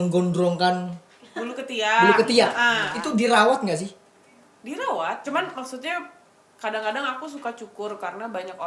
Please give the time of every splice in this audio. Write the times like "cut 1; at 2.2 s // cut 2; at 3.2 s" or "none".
cut 1; at 2.9 s // cut 2; at 5.2 s